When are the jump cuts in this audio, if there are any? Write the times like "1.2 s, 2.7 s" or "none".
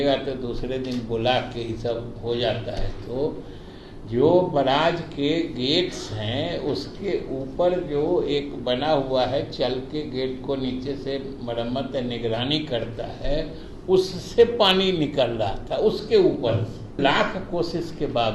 17.0 s

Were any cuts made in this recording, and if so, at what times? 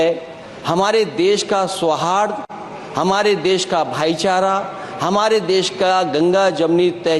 none

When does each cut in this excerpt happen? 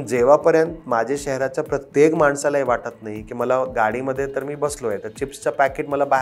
none

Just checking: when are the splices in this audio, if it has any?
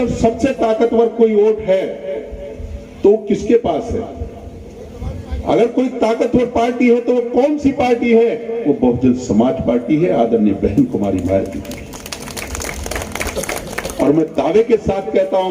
none

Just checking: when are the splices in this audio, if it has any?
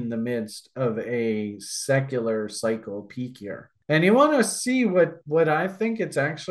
3.7 s

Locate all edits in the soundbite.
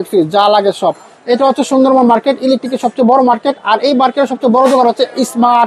none

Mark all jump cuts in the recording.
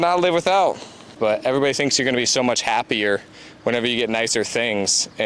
1.2 s

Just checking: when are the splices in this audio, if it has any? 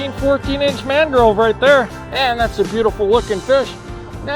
2.0 s

